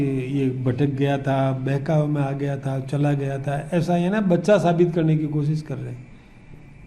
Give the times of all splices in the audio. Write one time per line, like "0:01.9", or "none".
none